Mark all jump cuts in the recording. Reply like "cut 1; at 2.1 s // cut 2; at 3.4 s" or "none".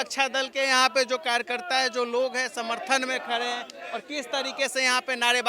none